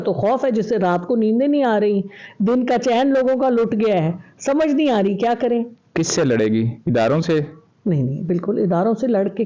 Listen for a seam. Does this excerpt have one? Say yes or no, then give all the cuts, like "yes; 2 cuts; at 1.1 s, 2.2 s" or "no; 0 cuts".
no; 0 cuts